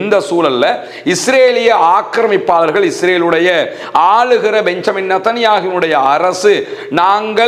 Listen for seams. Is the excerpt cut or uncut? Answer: uncut